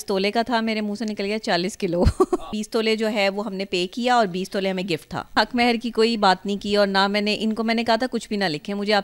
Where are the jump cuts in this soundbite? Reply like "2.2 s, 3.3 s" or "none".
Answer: 2.5 s, 5.3 s